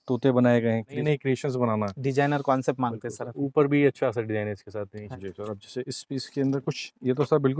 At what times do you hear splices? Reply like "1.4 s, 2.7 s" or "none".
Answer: 1.0 s, 5.3 s